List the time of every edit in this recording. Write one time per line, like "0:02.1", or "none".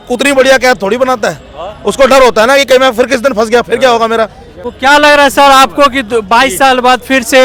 none